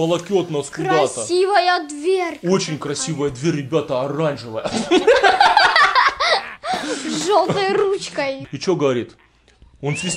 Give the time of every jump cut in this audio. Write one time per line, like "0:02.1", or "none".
0:08.4

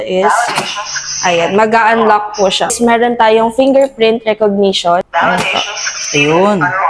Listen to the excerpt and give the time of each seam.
0:02.8
0:05.0

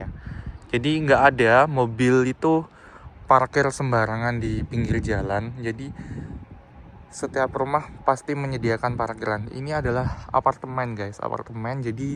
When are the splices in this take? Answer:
none

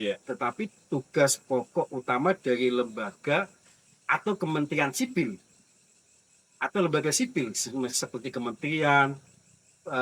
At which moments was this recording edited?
none

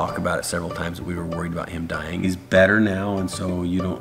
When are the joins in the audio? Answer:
0:02.2

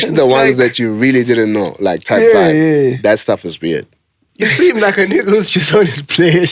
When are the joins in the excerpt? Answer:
0:04.2

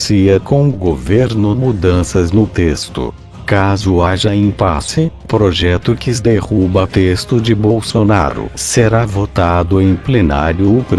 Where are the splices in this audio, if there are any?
0:10.1

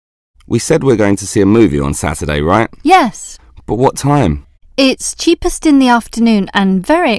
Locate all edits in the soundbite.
0:02.7

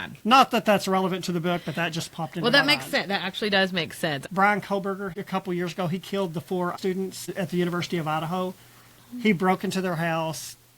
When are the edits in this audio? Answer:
0:04.2
0:05.1
0:06.7

